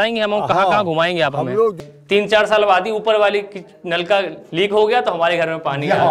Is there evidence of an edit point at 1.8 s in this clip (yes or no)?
yes